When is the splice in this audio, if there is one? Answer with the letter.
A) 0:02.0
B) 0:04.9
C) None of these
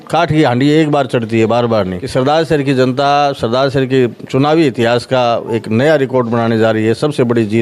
A